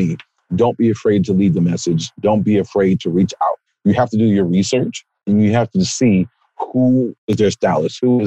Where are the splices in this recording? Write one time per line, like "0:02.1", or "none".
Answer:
0:03.7
0:07.2